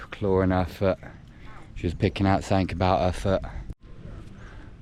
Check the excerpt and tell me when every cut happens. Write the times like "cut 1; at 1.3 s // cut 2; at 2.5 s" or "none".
none

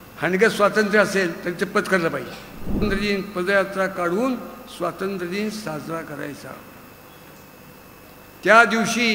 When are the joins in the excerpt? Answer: cut 1; at 2.8 s

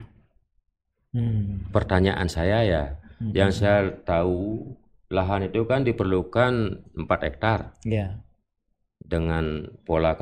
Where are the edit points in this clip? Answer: none

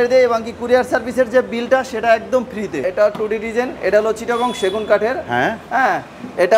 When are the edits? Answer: cut 1; at 2.8 s

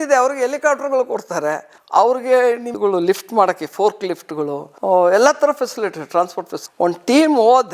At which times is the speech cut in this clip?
cut 1; at 1.7 s

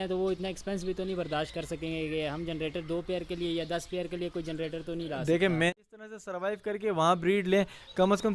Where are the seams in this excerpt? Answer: cut 1; at 5.8 s

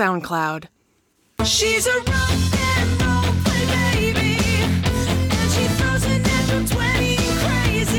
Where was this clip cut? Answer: cut 1; at 1.4 s

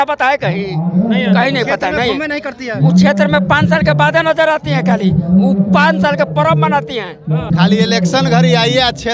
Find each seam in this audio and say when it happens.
cut 1; at 7.5 s

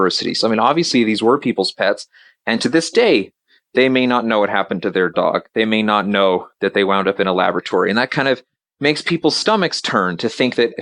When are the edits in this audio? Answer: none

